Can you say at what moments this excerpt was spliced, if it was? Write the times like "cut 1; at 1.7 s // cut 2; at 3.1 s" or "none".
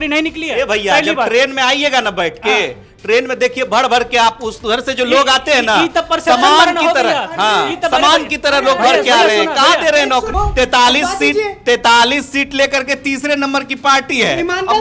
cut 1; at 10.3 s